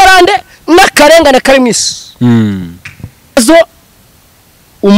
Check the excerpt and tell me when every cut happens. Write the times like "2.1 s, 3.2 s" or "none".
3.4 s

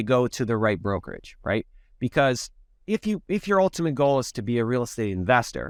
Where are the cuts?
none

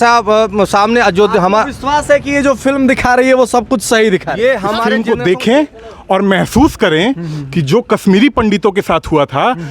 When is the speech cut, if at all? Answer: 4.9 s

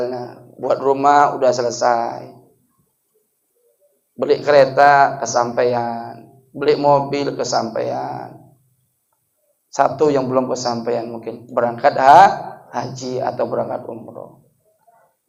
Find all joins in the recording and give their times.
none

